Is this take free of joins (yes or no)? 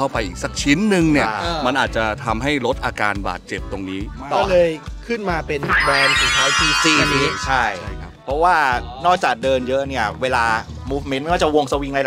yes